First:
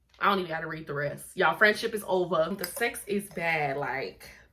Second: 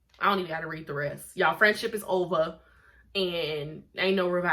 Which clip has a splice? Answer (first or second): first